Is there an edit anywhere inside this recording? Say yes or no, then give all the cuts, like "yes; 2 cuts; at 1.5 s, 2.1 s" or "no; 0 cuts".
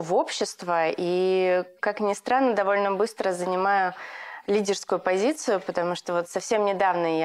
no; 0 cuts